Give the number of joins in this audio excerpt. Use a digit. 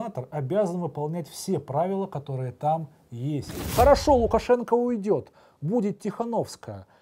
1